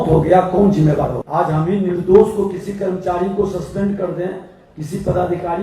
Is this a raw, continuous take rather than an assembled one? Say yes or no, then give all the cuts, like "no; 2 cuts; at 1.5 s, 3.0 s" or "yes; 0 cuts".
no; 1 cut; at 1.2 s